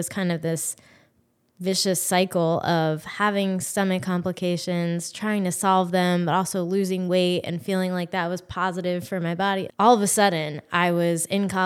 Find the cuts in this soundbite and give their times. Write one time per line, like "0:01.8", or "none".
0:09.7

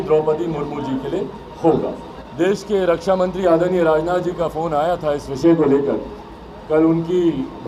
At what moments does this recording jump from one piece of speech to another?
none

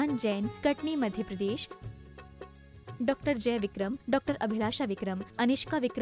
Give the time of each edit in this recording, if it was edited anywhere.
none

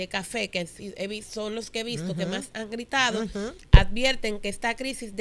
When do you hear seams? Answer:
none

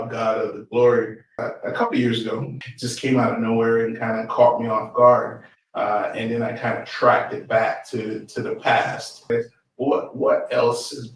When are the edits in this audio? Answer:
0:01.4
0:02.6
0:09.3

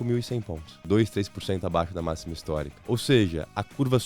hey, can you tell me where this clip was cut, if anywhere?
0:00.8
0:02.7

